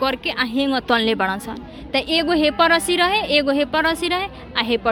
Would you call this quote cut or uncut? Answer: uncut